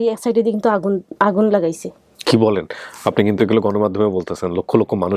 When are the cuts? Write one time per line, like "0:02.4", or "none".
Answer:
none